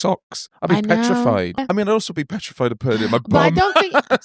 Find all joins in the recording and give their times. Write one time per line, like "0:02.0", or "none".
0:01.6